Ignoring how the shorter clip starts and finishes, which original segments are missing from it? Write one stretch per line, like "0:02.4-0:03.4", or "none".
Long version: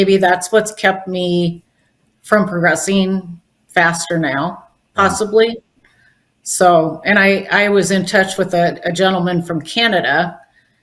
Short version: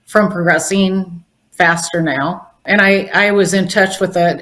0:04.8-0:07.0